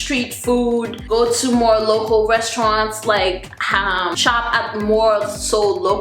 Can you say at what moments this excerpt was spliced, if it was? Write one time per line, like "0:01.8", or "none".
0:01.1
0:04.2